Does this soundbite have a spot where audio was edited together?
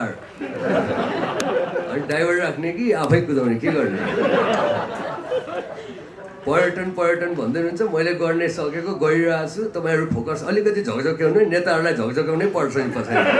no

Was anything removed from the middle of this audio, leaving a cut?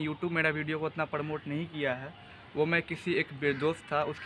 no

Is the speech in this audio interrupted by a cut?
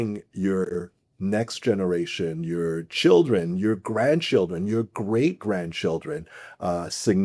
no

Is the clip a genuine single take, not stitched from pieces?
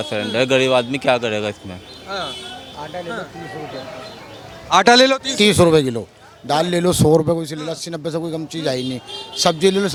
yes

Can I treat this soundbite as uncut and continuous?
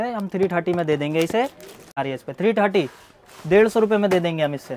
no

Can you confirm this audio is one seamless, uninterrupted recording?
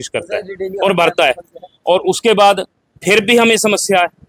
yes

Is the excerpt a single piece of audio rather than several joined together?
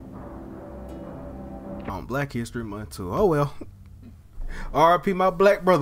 no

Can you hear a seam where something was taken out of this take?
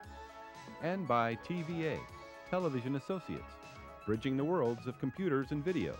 no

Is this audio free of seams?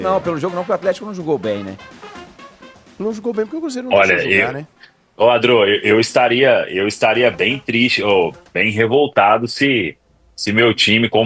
yes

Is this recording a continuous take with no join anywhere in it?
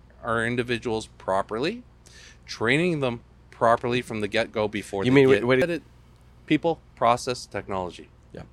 no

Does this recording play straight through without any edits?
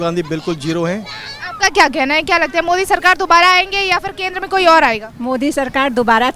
yes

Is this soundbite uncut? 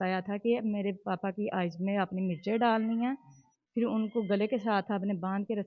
yes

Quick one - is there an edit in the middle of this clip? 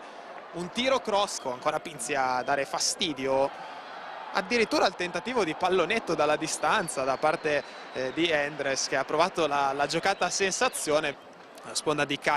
yes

